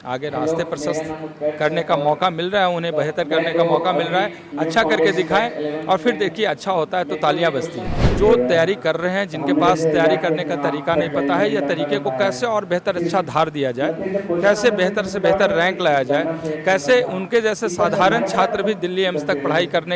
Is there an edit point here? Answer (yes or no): yes